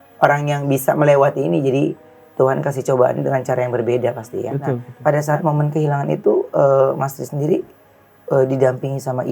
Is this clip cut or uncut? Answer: cut